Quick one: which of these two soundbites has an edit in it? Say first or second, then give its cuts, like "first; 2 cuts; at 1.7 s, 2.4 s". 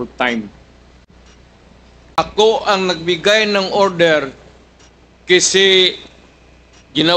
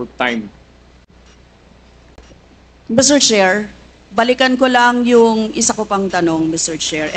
first; 1 cut; at 2.2 s